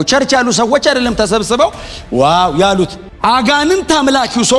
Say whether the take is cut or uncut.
uncut